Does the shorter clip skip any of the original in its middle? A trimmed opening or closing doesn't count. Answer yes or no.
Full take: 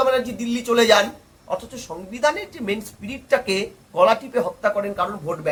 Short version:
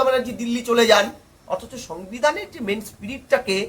no